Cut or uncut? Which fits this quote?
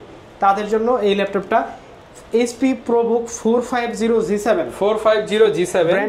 uncut